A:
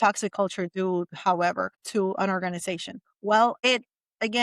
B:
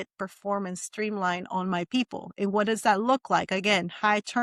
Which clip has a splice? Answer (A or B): A